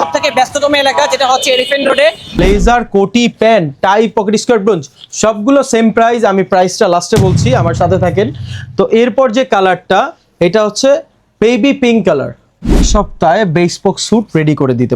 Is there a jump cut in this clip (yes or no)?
yes